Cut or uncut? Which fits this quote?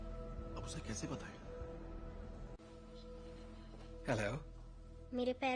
uncut